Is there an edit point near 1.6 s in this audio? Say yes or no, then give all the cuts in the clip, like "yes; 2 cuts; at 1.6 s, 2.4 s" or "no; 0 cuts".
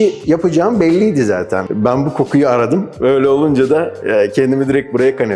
yes; 1 cut; at 1.6 s